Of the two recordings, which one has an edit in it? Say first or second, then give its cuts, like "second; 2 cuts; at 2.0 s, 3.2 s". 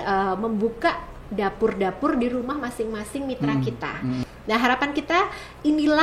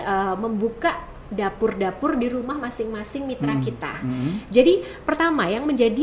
first; 1 cut; at 4.2 s